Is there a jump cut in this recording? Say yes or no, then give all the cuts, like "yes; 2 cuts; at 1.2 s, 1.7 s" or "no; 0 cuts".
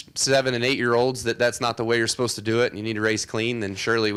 no; 0 cuts